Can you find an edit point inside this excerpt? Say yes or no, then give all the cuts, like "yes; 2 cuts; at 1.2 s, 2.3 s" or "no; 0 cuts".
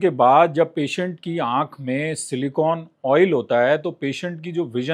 no; 0 cuts